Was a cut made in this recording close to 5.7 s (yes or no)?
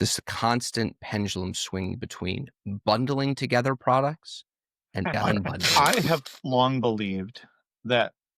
yes